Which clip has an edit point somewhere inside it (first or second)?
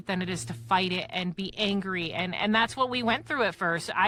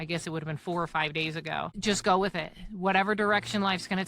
second